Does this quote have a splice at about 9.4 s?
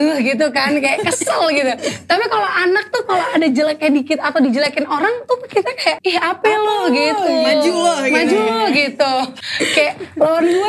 yes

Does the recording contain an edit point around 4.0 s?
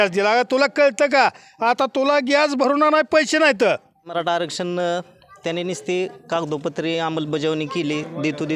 yes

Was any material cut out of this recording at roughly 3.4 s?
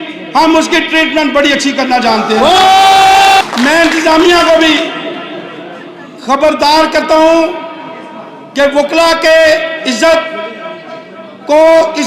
yes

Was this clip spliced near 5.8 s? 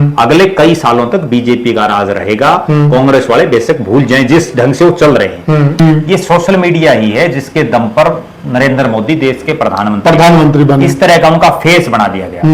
yes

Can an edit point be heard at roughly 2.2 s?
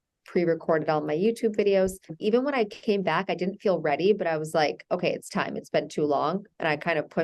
yes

